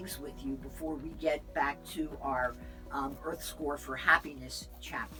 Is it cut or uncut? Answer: uncut